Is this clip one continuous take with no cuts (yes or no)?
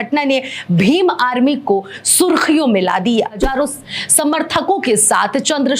no